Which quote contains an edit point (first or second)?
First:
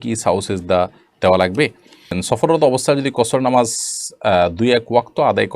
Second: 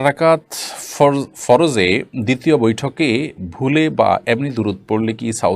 first